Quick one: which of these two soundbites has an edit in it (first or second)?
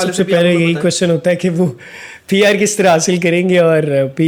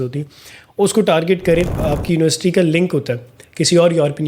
second